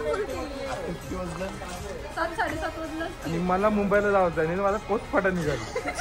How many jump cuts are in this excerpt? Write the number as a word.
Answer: zero